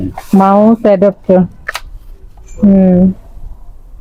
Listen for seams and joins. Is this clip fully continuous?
yes; 0 cuts

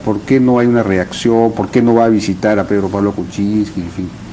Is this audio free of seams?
no; 1 cut; at 1.3 s

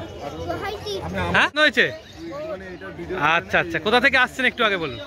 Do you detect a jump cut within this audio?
yes; 1 cut; at 1.6 s

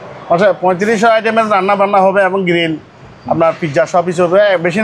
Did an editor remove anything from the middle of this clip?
no; 0 cuts

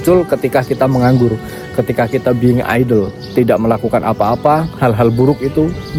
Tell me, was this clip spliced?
no; 0 cuts

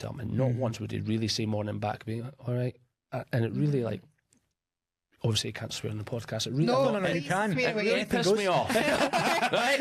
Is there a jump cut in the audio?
no; 0 cuts

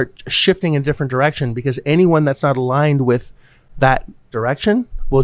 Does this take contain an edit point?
no; 0 cuts

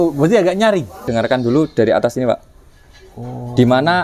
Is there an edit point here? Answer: yes; 1 cut; at 1.1 s

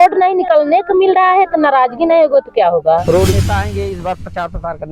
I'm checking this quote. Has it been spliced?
yes; 1 cut; at 3.3 s

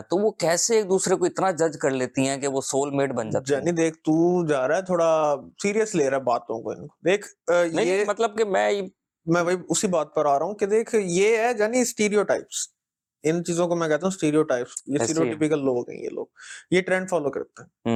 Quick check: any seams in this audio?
no; 0 cuts

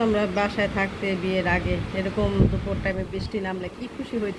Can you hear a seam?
no; 0 cuts

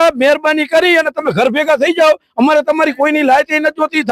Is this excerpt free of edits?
yes; 0 cuts

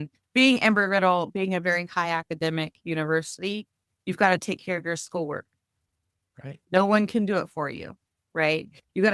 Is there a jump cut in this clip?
no; 0 cuts

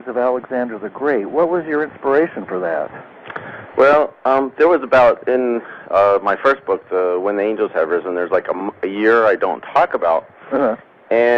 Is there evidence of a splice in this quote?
no; 0 cuts

